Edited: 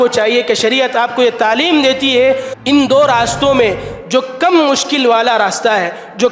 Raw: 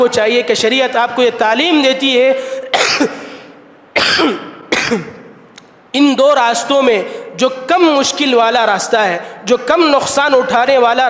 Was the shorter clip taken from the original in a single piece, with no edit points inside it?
no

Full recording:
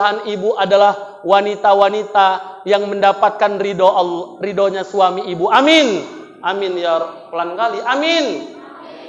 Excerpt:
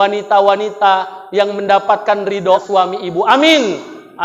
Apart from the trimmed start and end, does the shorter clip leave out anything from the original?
yes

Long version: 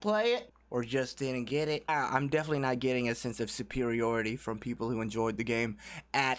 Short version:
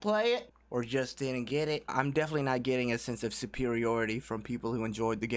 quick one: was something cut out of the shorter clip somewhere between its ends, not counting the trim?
yes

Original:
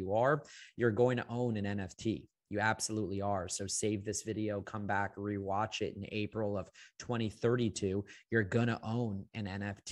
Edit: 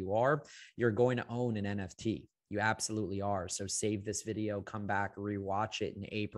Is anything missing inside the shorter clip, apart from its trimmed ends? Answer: no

